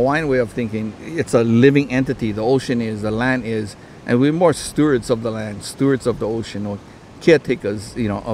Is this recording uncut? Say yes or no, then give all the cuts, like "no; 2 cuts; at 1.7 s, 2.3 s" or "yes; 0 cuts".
no; 1 cut; at 1.0 s